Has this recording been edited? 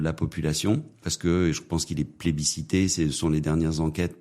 yes; 1 cut; at 1.0 s

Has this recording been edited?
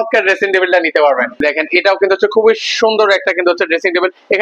yes; 1 cut; at 1.4 s

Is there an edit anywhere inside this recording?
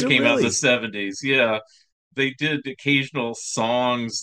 no; 0 cuts

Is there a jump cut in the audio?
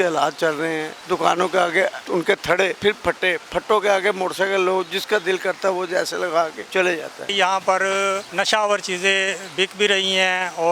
yes; 5 cuts; at 0.9 s, 2.0 s, 2.8 s, 7.1 s, 8.3 s

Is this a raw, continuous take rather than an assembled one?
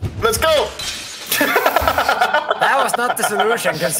yes; 0 cuts

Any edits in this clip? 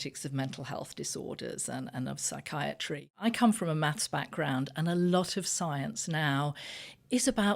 yes; 1 cut; at 3.1 s

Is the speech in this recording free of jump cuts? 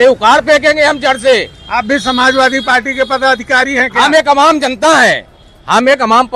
yes; 0 cuts

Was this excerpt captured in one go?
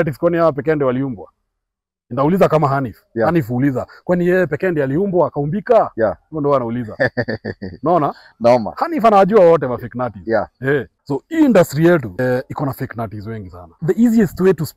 no; 3 cuts; at 11.0 s, 12.2 s, 13.7 s

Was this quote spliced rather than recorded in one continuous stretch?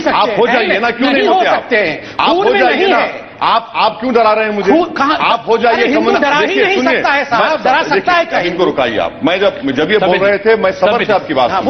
no; 0 cuts

